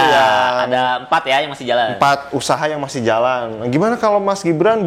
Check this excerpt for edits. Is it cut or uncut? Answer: uncut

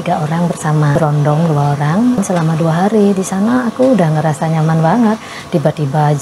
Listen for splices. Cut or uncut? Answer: cut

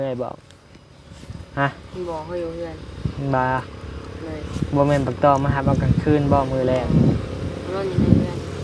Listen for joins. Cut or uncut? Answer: uncut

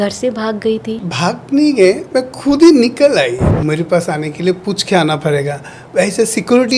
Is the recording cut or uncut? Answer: cut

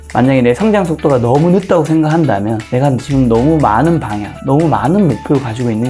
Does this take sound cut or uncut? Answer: cut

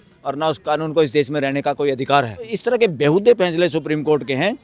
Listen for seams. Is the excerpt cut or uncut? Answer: cut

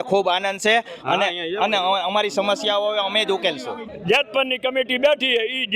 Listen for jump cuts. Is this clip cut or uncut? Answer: cut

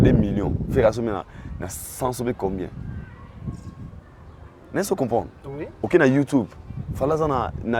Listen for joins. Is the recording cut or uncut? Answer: uncut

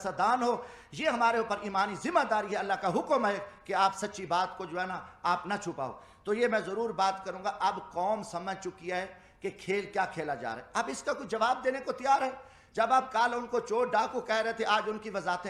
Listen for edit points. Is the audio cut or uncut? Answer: uncut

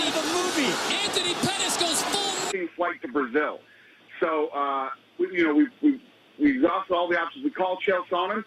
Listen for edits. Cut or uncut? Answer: uncut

